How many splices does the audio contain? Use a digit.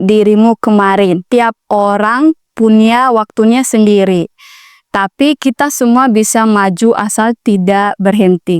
1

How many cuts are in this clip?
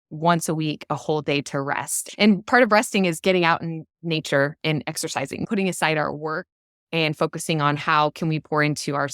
1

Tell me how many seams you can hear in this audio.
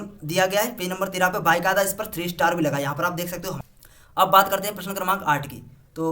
1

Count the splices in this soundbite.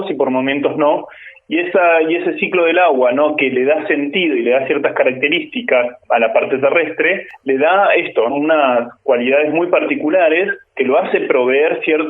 4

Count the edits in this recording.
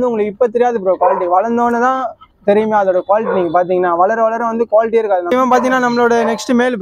1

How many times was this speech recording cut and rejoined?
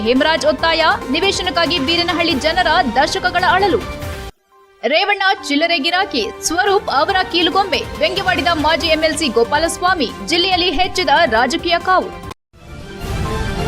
1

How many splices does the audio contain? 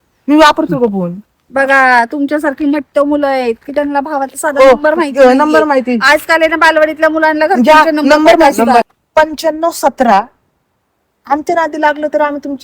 1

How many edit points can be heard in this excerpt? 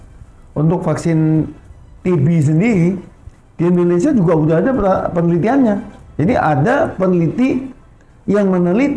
0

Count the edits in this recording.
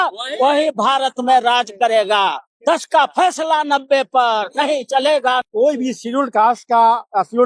2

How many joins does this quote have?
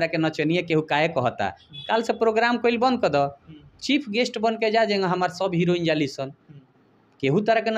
0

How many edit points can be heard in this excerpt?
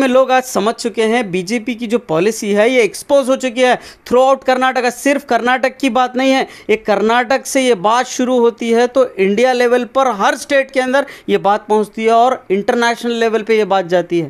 0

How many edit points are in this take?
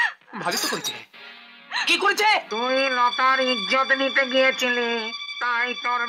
1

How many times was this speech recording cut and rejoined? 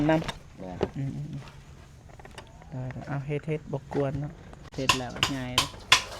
1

